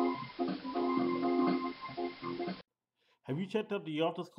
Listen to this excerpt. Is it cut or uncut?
uncut